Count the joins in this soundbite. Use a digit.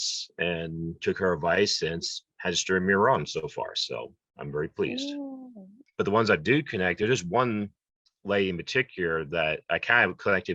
1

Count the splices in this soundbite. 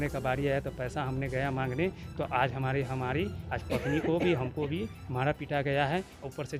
0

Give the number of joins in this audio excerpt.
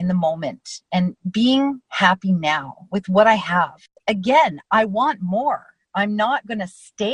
1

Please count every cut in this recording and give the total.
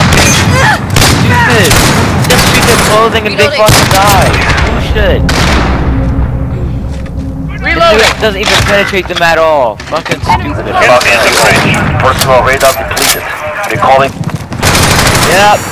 1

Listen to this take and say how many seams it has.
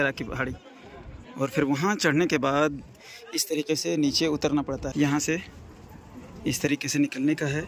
1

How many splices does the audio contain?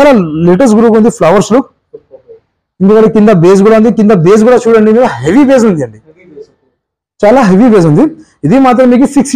0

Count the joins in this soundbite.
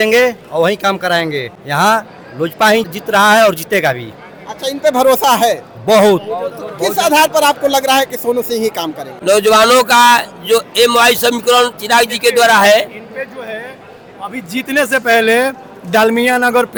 0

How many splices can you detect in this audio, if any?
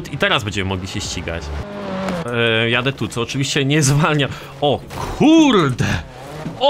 1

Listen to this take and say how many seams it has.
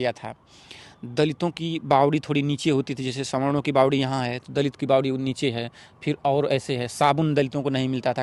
0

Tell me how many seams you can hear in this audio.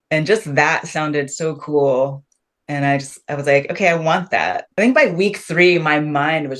1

